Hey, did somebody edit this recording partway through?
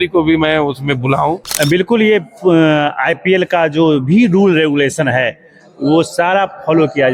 yes; 1 cut; at 1.9 s

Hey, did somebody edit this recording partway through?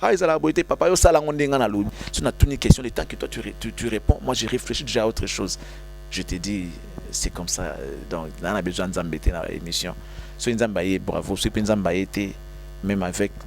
yes; 1 cut; at 2.0 s

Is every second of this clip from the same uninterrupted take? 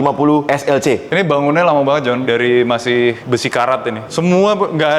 no; 3 cuts; at 1.1 s, 2.2 s, 4.0 s

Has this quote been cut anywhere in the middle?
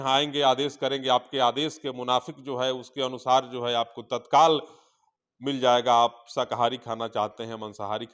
no; 0 cuts

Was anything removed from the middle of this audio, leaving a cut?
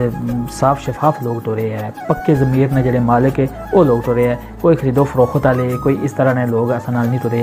no; 0 cuts

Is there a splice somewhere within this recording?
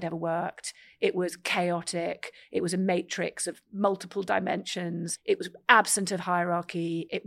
yes; 2 cuts; at 3.6 s, 5.1 s

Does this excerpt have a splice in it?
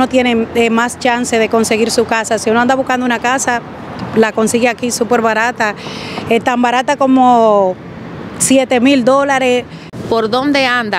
yes; 1 cut; at 9.8 s

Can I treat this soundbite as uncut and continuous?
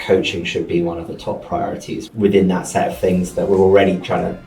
no; 1 cut; at 2.0 s

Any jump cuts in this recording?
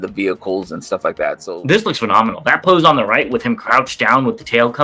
yes; 1 cut; at 1.4 s

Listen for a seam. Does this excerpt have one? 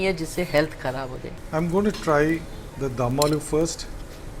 yes; 1 cut; at 1.3 s

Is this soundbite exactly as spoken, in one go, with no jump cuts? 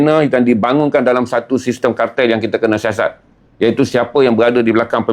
yes; 0 cuts

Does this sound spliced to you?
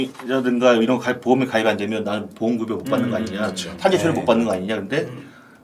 no; 0 cuts

